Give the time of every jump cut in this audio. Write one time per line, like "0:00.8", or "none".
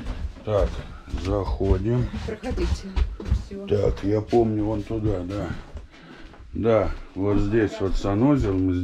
none